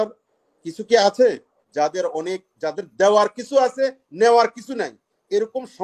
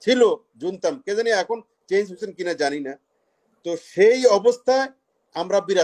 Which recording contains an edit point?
first; 1 cut; at 1.5 s

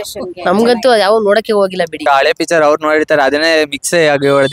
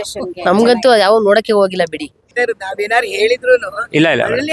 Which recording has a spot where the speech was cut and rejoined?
first; 1 cut; at 2.0 s

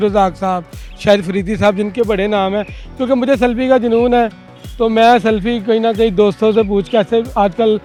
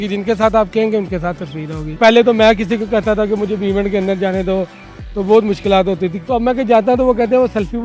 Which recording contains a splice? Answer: second; 2 cuts; at 2.0 s, 6.2 s

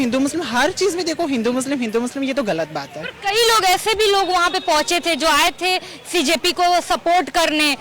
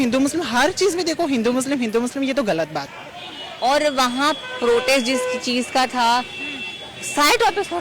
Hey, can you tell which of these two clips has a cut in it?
second; 1 cut; at 3.0 s

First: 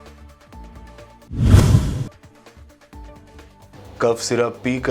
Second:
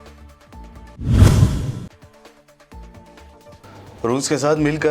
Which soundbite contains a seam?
second; 1 cut; at 1.0 s

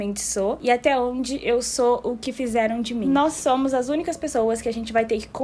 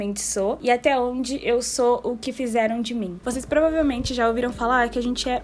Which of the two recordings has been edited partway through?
first; 1 cut; at 3.0 s

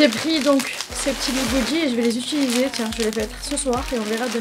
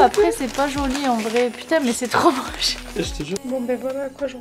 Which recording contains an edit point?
second; 1 cut; at 3.4 s

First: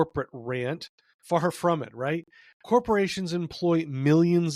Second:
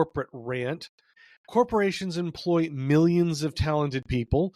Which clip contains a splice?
second; 1 cut; at 1.1 s

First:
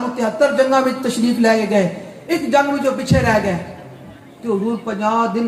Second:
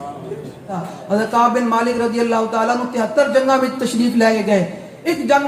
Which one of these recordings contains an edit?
second; 1 cut; at 0.9 s

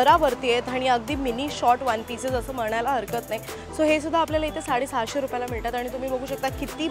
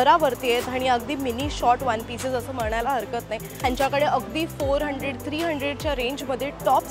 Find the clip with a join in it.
second; 1 cut; at 3.6 s

